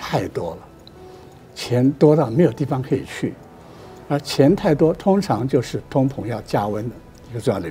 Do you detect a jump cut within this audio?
no; 0 cuts

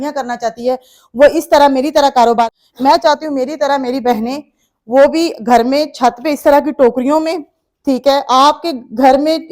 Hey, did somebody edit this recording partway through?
yes; 1 cut; at 2.4 s

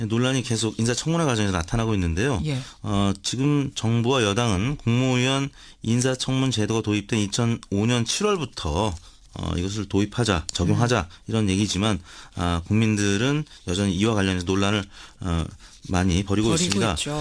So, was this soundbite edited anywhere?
no; 0 cuts

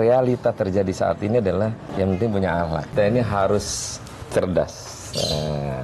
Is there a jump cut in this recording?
yes; 2 cuts; at 1.9 s, 2.9 s

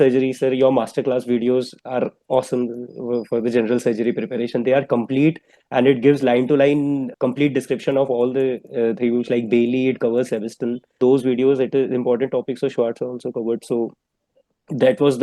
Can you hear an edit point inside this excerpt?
yes; 2 cuts; at 7.1 s, 11.0 s

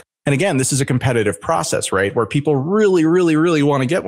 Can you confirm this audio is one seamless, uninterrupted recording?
yes; 0 cuts

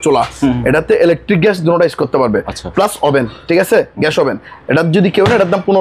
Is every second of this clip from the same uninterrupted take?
yes; 0 cuts

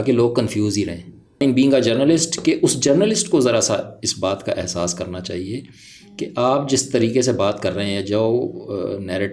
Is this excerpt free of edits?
no; 1 cut; at 1.4 s

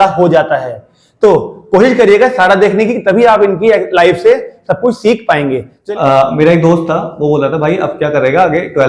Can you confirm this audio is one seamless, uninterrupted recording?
no; 1 cut; at 5.7 s

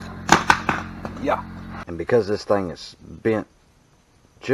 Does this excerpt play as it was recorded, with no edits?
no; 1 cut; at 1.7 s

